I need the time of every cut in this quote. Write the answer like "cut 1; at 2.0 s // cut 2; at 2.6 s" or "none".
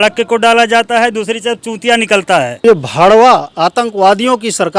cut 1; at 2.5 s